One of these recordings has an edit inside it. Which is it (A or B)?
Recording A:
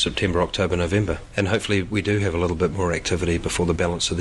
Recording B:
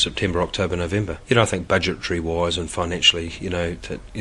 A